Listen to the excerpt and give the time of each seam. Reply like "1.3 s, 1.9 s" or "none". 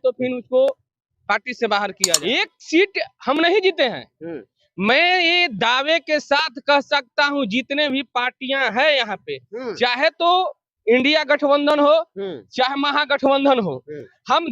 2.0 s